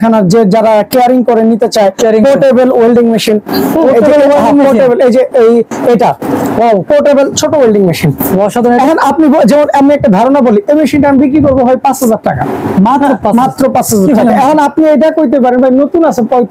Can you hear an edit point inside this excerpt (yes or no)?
no